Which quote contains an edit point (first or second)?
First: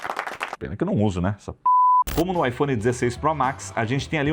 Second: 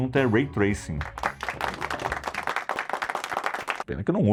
first